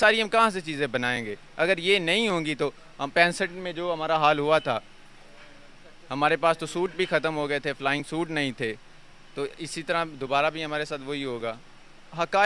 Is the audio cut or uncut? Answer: uncut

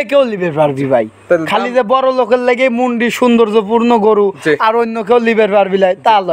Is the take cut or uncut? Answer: uncut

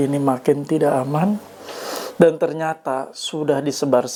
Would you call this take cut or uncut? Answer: uncut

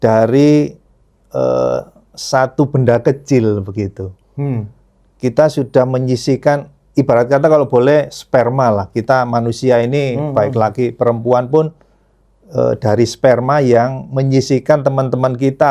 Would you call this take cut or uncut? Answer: uncut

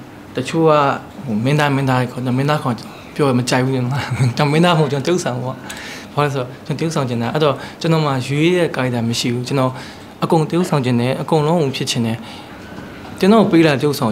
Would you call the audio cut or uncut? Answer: uncut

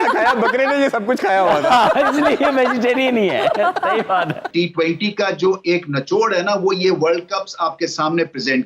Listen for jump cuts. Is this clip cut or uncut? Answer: cut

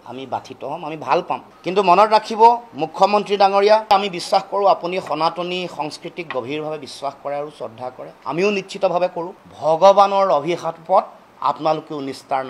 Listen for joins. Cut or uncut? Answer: cut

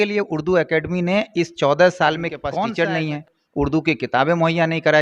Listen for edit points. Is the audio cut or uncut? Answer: cut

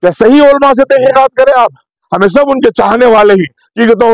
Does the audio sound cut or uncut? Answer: cut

